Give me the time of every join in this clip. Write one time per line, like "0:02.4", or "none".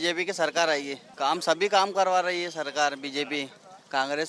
0:01.0